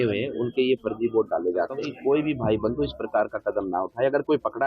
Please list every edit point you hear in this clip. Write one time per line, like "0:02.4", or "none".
0:01.8